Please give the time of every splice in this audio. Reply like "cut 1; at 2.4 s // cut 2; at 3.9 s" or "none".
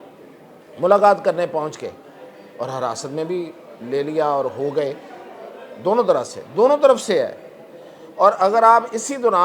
none

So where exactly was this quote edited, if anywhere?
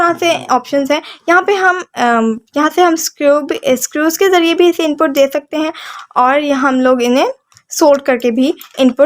none

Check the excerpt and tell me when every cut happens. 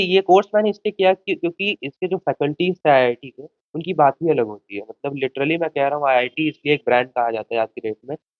none

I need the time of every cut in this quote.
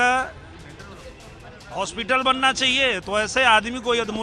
none

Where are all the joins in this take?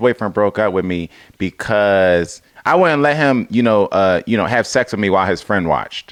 none

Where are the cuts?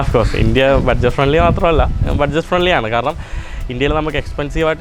none

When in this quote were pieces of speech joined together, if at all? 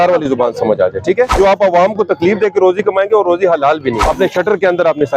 cut 1; at 1.3 s // cut 2; at 4.0 s

